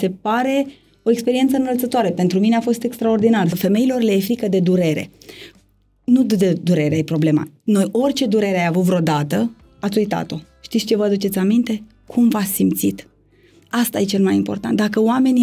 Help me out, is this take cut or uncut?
cut